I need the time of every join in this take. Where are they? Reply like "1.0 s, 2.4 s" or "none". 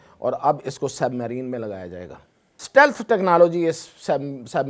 2.5 s